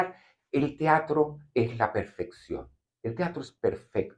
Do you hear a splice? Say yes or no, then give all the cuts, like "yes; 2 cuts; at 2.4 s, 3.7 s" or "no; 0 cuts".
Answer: no; 0 cuts